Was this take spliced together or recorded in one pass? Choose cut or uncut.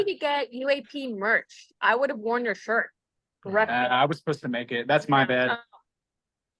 uncut